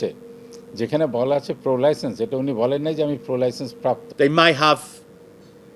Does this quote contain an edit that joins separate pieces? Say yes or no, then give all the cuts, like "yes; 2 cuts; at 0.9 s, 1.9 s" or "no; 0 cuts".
yes; 1 cut; at 4.1 s